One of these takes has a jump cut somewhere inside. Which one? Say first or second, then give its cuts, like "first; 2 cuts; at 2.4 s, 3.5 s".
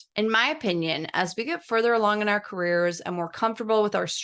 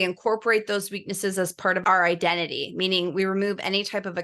second; 1 cut; at 1.8 s